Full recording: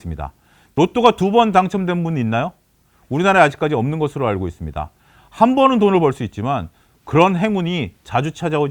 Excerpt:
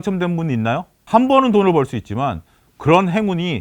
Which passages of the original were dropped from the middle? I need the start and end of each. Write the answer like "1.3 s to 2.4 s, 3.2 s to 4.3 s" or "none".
2.6 s to 5.2 s